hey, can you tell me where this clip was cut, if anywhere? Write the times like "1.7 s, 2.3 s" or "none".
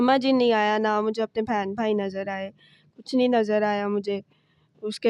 none